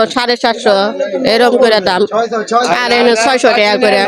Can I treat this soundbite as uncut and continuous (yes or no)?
yes